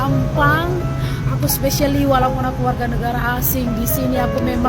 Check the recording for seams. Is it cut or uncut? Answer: uncut